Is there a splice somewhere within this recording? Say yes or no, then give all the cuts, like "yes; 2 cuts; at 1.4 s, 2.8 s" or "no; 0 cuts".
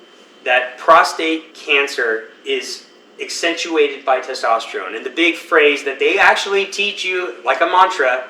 no; 0 cuts